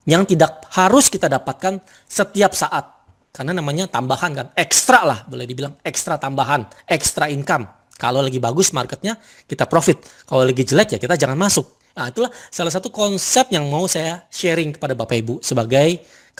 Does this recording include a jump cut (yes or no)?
no